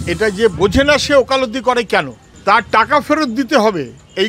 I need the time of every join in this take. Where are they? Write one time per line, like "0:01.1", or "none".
0:02.2